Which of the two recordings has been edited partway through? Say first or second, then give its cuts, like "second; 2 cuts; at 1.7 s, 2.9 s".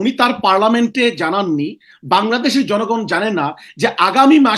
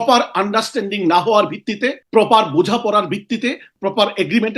second; 2 cuts; at 2.0 s, 3.7 s